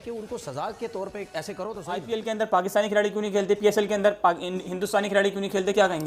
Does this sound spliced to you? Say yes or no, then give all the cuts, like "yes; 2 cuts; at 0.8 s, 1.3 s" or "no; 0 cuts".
yes; 1 cut; at 2.0 s